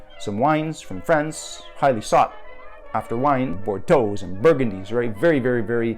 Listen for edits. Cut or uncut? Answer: cut